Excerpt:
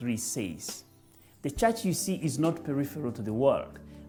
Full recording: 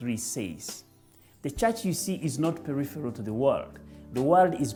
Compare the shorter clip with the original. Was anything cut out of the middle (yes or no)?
no